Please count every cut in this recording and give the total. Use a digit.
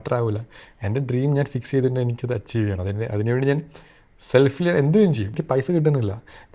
1